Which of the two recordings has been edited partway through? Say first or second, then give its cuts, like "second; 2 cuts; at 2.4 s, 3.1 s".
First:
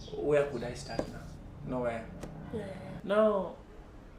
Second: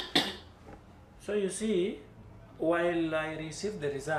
first; 1 cut; at 2.9 s